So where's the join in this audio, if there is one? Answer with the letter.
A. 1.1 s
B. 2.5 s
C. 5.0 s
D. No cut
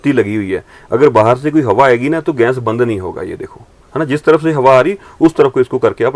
D